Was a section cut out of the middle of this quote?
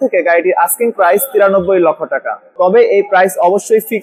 no; 0 cuts

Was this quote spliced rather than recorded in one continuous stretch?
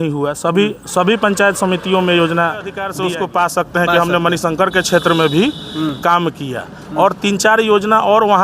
yes; 1 cut; at 2.9 s

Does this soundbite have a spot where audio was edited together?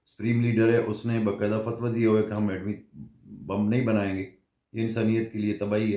no; 0 cuts

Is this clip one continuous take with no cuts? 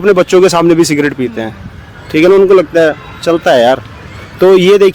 yes; 0 cuts

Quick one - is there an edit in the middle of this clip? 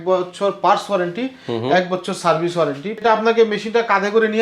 yes; 1 cut; at 3.0 s

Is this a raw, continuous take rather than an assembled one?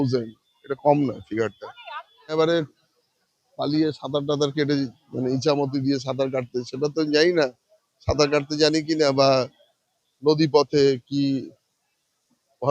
no; 1 cut; at 2.3 s

